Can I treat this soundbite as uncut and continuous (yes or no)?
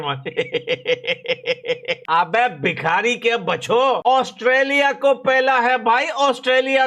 no